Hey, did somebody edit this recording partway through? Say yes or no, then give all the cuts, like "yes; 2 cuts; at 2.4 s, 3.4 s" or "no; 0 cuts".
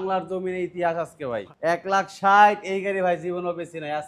yes; 1 cut; at 1.5 s